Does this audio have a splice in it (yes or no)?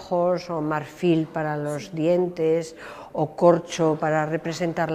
no